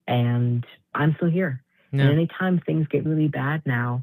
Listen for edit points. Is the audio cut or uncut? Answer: cut